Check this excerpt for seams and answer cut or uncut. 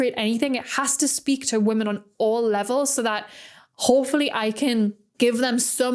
cut